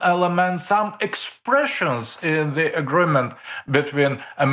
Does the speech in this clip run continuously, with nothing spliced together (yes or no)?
yes